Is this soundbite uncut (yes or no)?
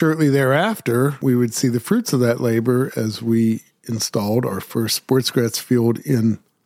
no